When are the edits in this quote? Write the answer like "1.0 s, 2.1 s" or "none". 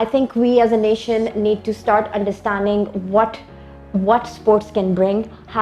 none

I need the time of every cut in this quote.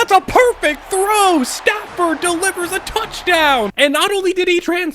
3.7 s

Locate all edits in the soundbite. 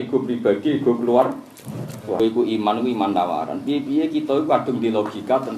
2.2 s

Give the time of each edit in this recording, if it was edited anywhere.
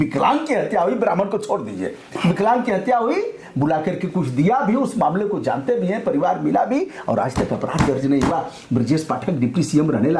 none

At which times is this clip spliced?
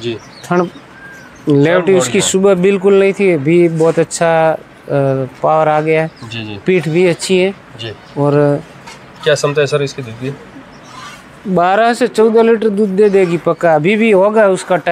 none

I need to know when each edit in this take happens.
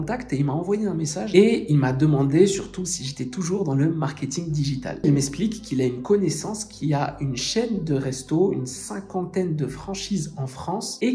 1.3 s, 5.0 s

